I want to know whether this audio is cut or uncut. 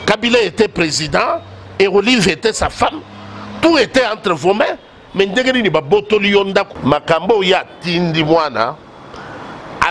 cut